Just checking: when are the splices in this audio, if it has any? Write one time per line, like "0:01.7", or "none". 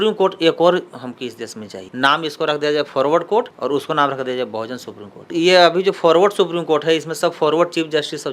0:01.8
0:05.3